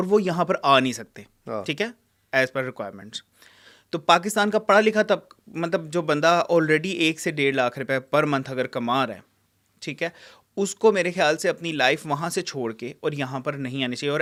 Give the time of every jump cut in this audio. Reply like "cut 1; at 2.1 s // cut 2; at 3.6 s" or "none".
none